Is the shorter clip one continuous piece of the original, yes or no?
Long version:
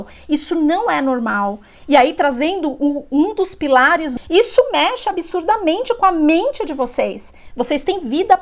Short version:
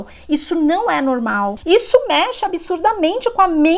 no